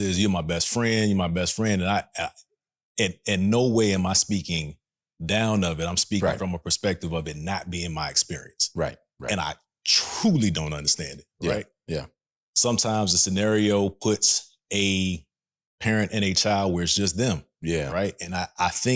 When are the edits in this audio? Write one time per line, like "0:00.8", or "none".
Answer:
none